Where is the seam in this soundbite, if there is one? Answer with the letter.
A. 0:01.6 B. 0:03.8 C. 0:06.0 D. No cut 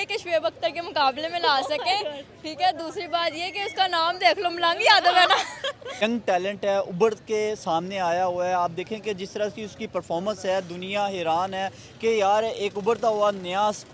C